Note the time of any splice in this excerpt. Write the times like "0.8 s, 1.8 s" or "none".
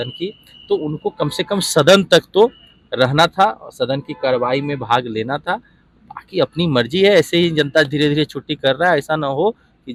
none